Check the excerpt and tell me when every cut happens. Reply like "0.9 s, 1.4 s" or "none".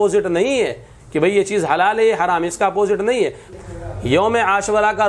3.5 s

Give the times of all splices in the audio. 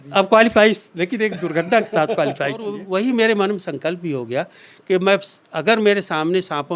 2.8 s

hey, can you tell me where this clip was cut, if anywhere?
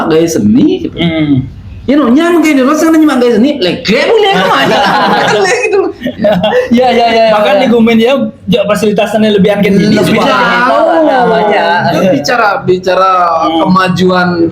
none

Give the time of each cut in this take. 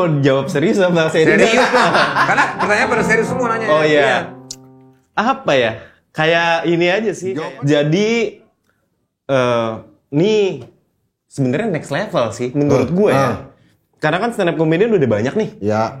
7.2 s

